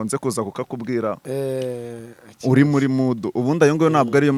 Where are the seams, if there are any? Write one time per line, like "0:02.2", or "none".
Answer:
none